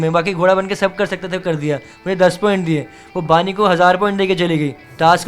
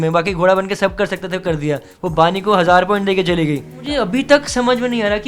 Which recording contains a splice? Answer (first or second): second